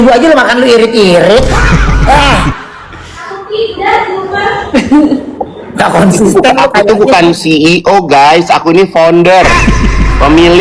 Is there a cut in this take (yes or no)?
no